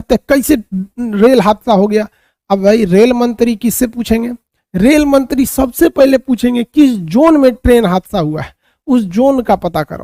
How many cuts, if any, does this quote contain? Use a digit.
0